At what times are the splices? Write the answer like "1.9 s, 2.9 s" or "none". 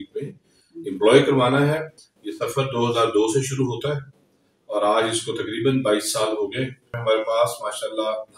2.0 s, 6.9 s